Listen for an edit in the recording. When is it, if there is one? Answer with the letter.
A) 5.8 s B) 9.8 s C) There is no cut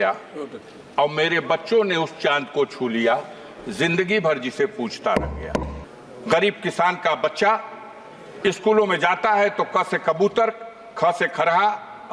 A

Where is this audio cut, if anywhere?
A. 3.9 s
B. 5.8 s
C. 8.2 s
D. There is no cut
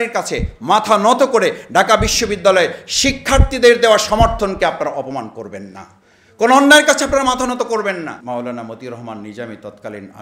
C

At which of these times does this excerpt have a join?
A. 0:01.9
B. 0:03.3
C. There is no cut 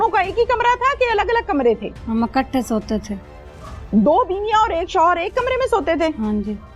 A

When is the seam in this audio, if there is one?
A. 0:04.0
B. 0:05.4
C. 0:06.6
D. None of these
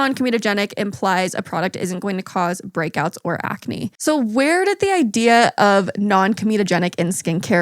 A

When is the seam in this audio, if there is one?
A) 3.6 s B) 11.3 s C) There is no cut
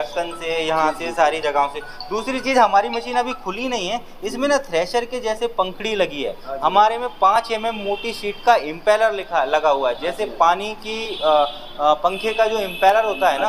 C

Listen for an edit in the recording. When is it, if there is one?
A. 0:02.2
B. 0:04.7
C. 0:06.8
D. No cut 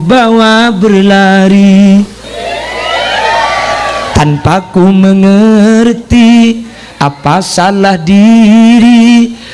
A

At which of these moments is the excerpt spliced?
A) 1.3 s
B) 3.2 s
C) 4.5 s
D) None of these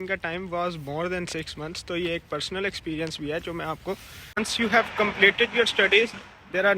C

